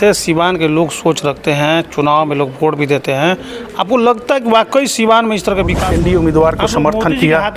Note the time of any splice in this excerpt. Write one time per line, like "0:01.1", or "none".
0:05.8